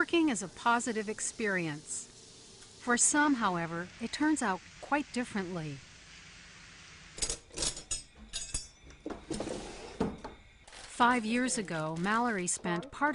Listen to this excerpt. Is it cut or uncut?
cut